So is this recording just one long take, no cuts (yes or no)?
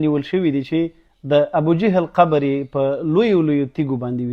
yes